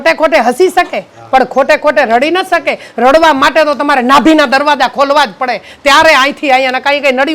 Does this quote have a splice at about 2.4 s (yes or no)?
no